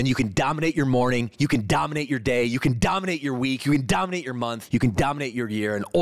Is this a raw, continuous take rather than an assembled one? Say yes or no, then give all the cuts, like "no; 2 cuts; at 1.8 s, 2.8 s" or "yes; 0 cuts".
no; 1 cut; at 4.6 s